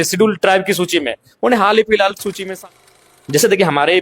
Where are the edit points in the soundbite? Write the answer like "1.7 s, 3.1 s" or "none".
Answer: 2.5 s